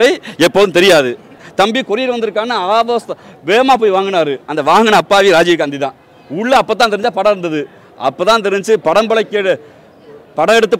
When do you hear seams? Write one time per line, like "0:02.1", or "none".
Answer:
0:01.4